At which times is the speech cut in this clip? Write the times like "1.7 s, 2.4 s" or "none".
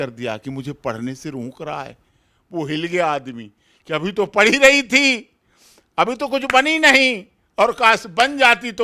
none